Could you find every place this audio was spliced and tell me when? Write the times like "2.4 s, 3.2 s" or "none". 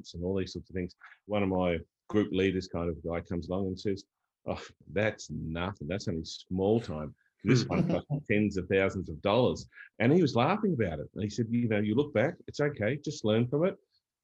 1.3 s, 1.9 s, 4.8 s